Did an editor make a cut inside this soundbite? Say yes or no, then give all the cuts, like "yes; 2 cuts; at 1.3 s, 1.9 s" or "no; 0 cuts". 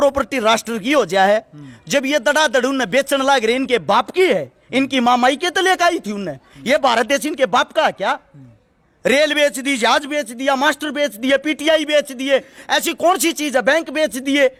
no; 0 cuts